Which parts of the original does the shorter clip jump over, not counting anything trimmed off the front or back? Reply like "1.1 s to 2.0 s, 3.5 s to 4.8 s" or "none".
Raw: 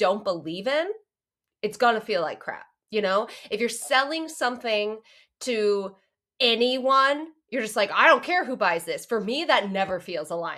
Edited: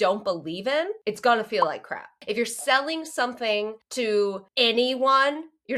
1.0 s to 1.5 s, 2.7 s to 3.4 s, 5.0 s to 5.3 s, 5.9 s to 6.3 s